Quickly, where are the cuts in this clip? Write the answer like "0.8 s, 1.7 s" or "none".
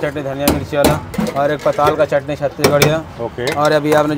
none